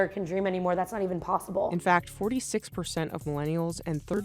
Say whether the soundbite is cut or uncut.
cut